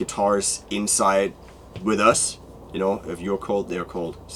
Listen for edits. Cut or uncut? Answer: uncut